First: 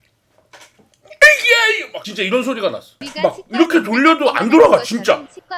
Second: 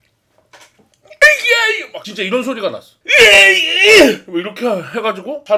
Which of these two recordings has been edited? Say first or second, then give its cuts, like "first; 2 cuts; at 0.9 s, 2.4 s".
first; 1 cut; at 3.0 s